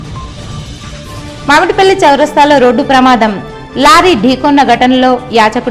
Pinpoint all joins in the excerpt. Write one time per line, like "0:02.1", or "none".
0:00.9